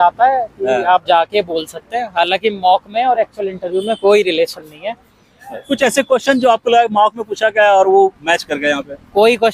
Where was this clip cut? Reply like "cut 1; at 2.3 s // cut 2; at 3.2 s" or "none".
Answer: none

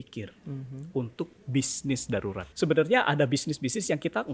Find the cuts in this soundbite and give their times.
cut 1; at 2.5 s

